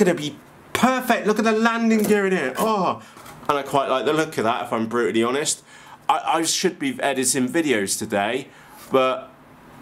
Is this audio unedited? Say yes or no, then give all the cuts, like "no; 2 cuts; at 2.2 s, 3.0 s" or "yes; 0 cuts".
no; 1 cut; at 3.1 s